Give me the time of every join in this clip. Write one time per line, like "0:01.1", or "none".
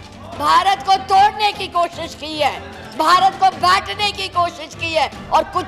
none